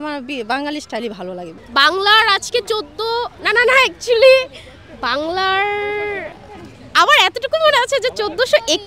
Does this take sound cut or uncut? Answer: cut